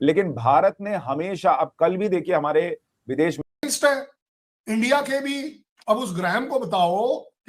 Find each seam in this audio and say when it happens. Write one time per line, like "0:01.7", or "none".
0:03.4